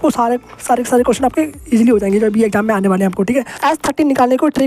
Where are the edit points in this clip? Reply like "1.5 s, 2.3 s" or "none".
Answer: 3.6 s